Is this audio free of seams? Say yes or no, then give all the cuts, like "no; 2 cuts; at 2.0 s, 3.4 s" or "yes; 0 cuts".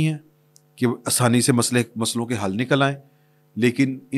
yes; 0 cuts